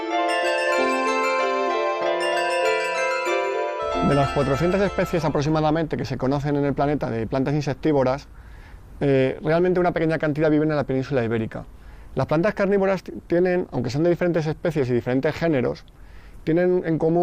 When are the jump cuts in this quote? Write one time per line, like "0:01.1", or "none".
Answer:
0:09.4